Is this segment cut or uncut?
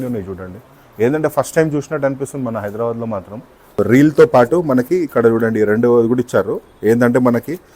cut